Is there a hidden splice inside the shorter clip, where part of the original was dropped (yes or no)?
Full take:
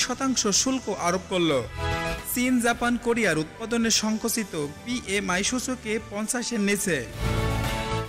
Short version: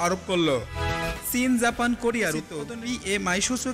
yes